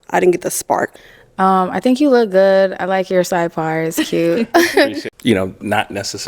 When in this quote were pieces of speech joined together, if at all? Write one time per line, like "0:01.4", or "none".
0:01.0
0:05.1